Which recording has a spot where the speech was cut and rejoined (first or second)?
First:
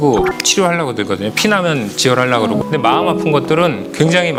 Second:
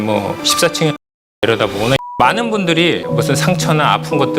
second